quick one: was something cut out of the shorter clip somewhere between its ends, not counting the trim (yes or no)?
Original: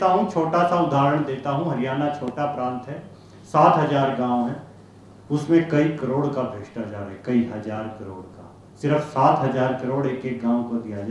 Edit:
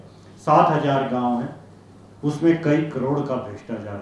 no